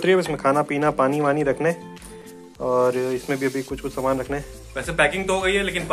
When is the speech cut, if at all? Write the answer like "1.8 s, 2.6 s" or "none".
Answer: 4.6 s